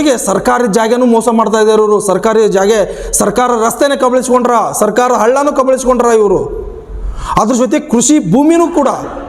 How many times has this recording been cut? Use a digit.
0